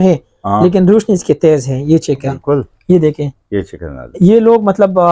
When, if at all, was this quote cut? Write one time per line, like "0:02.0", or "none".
0:02.4